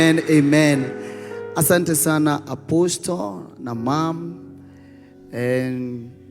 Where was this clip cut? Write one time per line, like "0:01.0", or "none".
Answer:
none